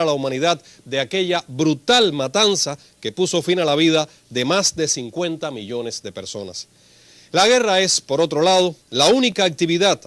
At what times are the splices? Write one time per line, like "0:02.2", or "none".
0:07.7

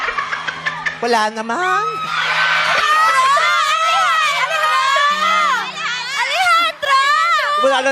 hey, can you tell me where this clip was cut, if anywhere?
0:03.3
0:04.5
0:05.7

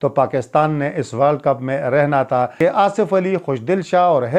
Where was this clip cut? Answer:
0:02.5

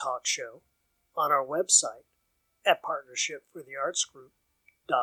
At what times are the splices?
none

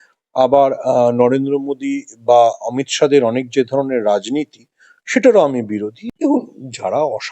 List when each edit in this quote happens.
0:06.0

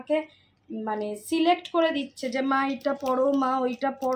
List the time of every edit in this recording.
none

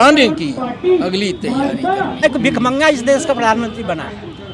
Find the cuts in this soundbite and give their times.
0:02.2

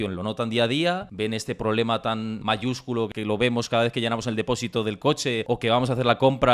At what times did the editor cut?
0:02.6

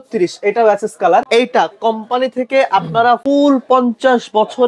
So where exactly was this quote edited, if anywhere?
0:01.3
0:03.2

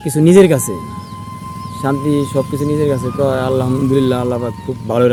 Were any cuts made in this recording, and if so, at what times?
none

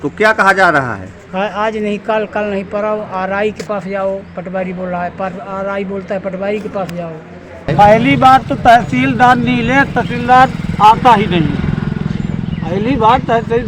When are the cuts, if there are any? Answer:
0:07.7

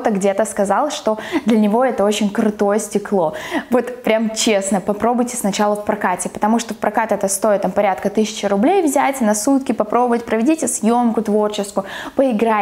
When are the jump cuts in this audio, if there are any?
none

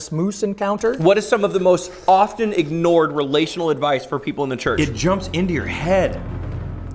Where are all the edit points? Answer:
0:01.0
0:04.8

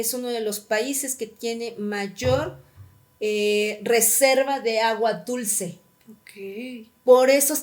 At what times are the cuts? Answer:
none

